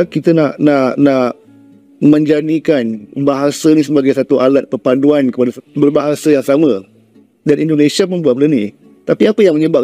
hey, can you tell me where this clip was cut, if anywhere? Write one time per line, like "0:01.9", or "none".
0:05.5